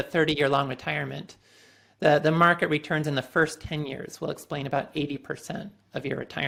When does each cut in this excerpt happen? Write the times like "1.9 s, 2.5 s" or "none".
none